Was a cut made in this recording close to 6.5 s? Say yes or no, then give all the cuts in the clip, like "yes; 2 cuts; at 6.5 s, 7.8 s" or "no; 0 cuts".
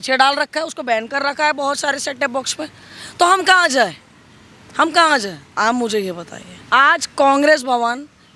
yes; 1 cut; at 6.5 s